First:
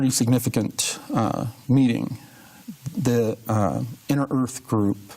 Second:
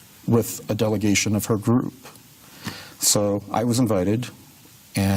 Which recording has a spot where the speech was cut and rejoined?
first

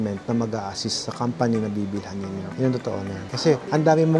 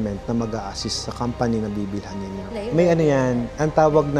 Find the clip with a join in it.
second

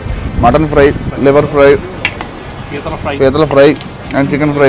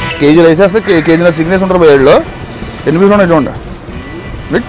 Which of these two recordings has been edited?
first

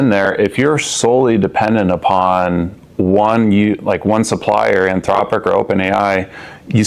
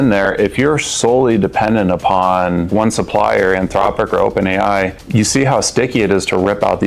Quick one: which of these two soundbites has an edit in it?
second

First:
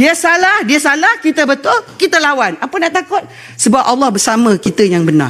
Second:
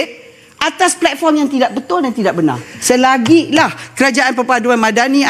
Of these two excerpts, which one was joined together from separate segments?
second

